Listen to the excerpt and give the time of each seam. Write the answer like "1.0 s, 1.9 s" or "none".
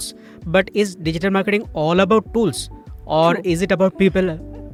none